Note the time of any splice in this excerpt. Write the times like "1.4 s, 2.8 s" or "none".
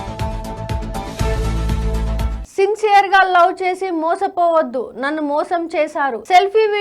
2.4 s